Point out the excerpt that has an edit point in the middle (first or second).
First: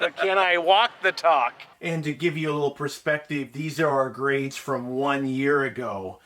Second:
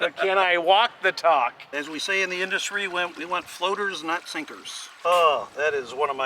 second